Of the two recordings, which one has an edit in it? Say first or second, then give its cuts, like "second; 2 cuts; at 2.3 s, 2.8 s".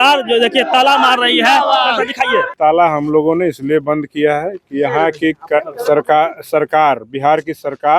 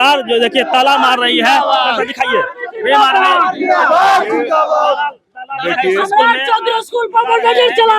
first; 1 cut; at 2.5 s